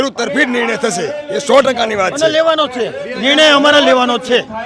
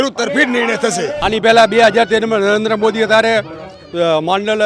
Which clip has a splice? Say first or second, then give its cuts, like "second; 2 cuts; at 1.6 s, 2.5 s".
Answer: second; 1 cut; at 1.2 s